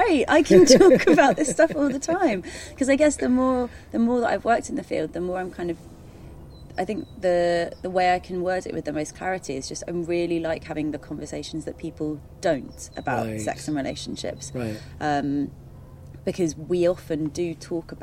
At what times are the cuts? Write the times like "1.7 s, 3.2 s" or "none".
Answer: none